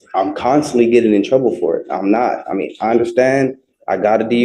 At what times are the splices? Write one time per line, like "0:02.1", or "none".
none